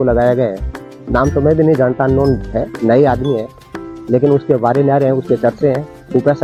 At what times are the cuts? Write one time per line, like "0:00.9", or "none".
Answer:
none